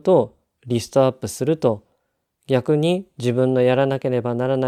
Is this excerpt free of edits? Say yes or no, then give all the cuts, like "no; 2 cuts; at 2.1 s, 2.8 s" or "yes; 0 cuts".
yes; 0 cuts